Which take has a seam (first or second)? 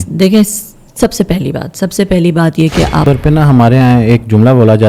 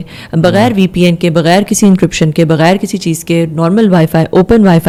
first